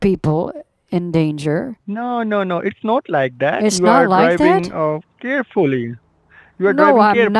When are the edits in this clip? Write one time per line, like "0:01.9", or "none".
0:01.8